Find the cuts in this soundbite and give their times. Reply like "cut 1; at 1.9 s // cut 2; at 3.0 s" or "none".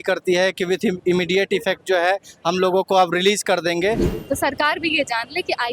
cut 1; at 4.1 s

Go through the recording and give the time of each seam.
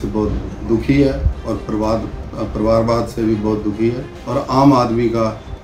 cut 1; at 4.1 s

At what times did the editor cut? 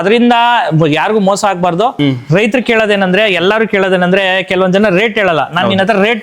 cut 1; at 2.0 s

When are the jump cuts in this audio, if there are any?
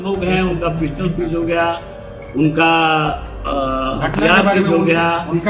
none

